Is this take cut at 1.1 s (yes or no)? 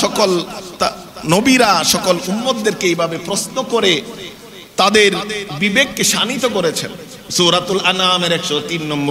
no